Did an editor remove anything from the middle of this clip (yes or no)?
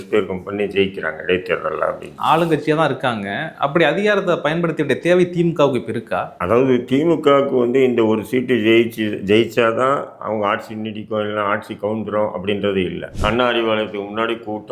yes